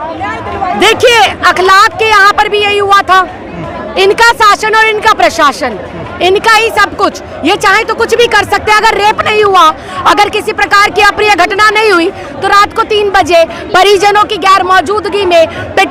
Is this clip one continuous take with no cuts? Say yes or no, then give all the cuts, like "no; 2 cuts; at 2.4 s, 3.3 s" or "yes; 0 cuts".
yes; 0 cuts